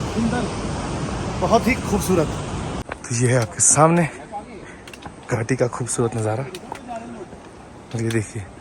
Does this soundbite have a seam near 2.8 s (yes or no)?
yes